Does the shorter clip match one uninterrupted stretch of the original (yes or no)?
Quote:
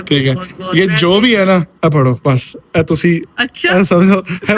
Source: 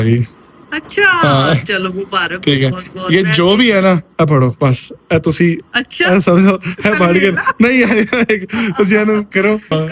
yes